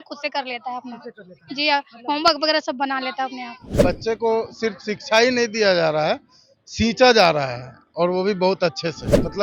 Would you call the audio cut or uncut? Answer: cut